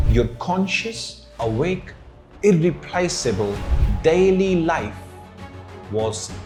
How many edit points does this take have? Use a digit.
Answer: 0